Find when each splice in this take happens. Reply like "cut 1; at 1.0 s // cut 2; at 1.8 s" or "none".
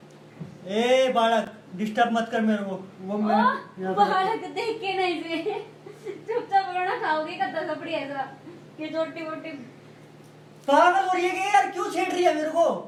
none